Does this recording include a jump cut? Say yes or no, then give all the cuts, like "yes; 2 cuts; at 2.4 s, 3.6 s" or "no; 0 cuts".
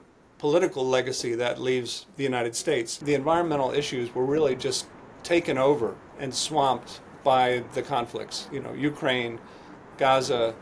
yes; 1 cut; at 2.9 s